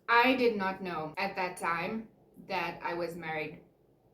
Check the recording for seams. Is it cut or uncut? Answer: cut